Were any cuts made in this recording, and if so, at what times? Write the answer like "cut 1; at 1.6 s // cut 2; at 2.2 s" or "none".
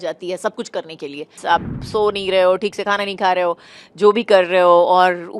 cut 1; at 1.3 s